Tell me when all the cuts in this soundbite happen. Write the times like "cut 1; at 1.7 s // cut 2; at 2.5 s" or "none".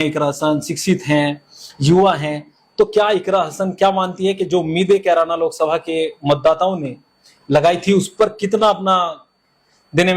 none

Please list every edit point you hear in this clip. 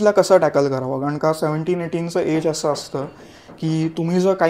none

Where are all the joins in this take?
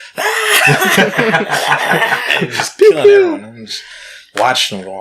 none

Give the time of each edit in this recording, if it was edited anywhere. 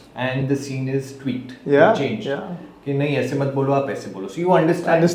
none

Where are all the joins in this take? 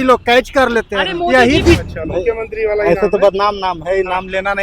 cut 1; at 1.8 s

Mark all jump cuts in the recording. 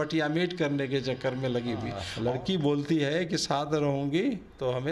cut 1; at 2.0 s

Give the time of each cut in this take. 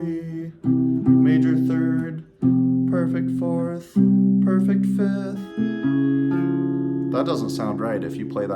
cut 1; at 5.4 s

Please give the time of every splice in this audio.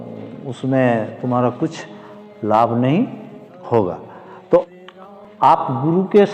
cut 1; at 4.7 s

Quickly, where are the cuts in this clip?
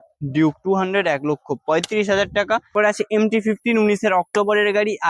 cut 1; at 2.7 s

